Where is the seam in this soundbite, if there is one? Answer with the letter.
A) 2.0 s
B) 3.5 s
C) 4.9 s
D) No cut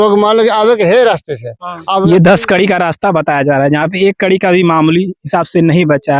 A